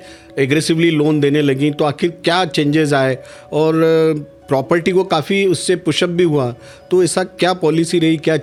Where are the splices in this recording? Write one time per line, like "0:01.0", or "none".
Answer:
none